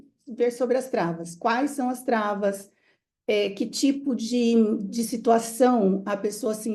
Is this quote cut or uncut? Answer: uncut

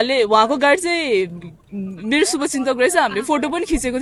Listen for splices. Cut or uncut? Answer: uncut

